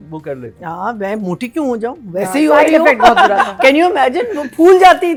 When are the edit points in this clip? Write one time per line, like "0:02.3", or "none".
none

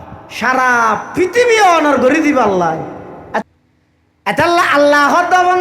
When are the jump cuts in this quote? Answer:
0:03.4

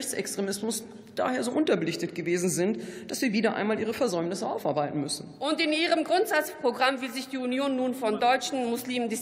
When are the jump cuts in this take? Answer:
0:05.3

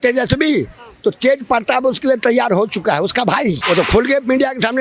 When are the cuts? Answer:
0:03.6

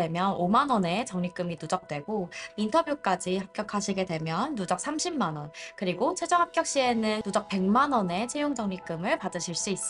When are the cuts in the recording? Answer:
0:02.4
0:07.2

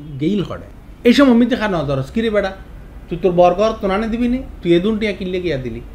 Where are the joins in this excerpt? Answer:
none

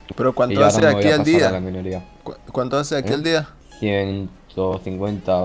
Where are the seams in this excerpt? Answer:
none

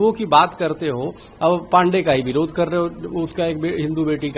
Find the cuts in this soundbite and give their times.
none

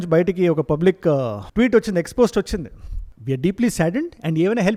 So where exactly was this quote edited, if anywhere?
none

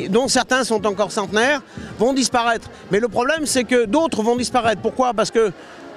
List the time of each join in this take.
none

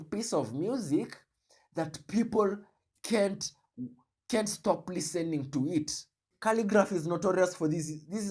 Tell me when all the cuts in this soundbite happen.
0:06.2

